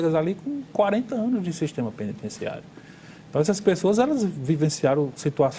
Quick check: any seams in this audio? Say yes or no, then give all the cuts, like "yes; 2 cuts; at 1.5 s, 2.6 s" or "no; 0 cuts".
no; 0 cuts